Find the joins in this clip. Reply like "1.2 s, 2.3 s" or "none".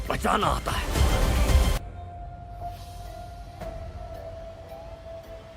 1.7 s